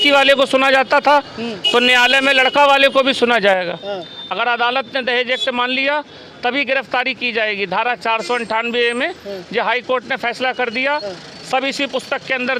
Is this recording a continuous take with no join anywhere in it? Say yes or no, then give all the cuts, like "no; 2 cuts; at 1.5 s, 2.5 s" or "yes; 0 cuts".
yes; 0 cuts